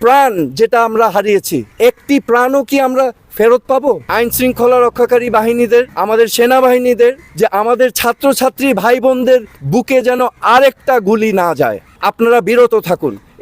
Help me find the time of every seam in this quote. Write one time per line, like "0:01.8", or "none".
0:01.6
0:04.1
0:06.0
0:07.3
0:11.9